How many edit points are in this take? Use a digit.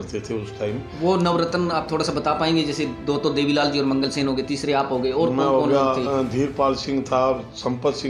0